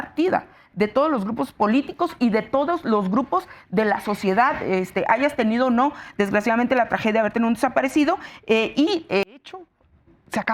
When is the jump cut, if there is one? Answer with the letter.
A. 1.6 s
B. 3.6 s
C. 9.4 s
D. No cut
C